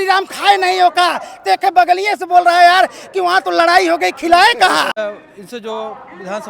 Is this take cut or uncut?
cut